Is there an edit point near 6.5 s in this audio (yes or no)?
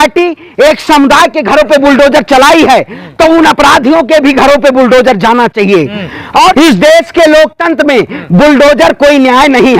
yes